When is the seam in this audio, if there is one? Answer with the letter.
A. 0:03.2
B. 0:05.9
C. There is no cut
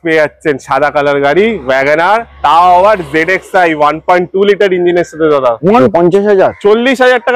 B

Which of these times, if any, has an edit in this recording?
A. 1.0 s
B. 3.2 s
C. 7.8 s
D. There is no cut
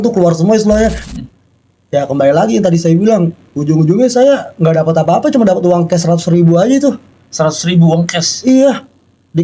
A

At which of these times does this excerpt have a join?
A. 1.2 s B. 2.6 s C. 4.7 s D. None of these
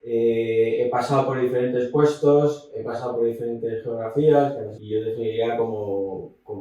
C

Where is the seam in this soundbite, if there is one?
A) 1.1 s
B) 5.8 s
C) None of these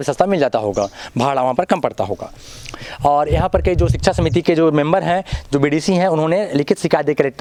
C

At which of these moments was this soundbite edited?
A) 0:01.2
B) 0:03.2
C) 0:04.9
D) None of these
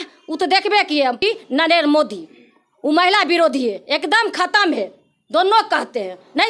A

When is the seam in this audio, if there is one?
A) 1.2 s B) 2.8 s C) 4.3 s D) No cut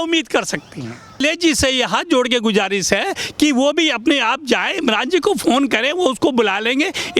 A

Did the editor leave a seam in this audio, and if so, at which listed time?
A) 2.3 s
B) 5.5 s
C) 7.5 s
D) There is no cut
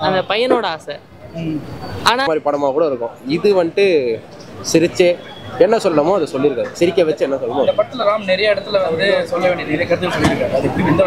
A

